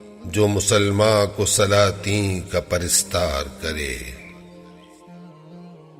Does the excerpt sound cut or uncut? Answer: uncut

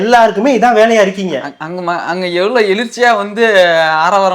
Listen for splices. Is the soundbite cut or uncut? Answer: uncut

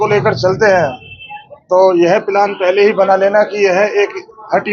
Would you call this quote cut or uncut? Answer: uncut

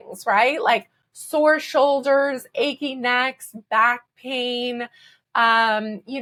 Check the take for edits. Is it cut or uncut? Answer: uncut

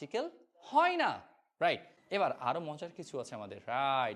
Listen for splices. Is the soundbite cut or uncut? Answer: cut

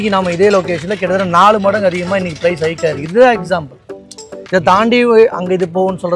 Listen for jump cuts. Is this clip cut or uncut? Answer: uncut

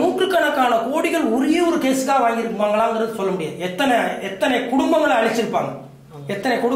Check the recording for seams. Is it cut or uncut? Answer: uncut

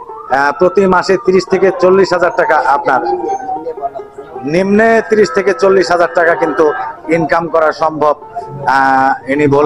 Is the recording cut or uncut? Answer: uncut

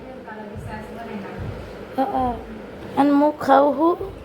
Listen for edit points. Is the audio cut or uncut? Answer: cut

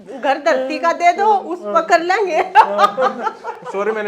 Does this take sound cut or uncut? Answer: uncut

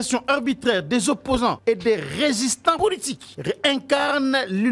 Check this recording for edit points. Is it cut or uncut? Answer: cut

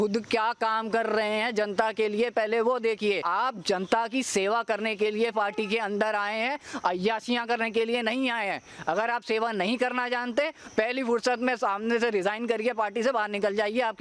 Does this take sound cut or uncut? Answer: cut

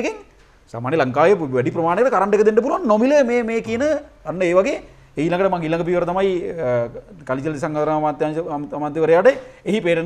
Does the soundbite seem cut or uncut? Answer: uncut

